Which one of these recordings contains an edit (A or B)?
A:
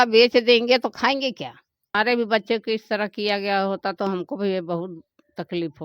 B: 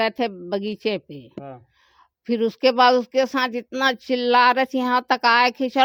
A